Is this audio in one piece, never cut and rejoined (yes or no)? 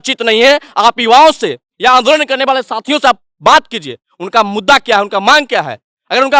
yes